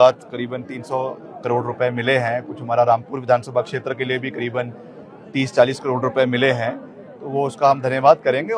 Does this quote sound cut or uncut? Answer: uncut